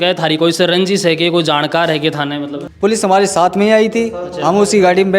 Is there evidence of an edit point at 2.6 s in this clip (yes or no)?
yes